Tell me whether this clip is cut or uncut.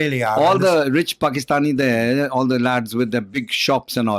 cut